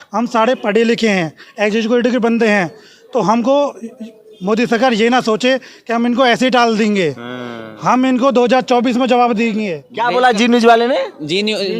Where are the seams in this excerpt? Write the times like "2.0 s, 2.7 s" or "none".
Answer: 9.8 s